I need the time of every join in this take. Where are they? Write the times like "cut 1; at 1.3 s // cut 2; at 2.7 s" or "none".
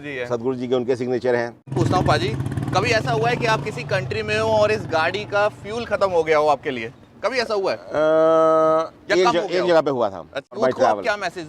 cut 1; at 1.7 s // cut 2; at 10.5 s